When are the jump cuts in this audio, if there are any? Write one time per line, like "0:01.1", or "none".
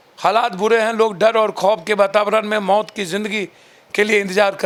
none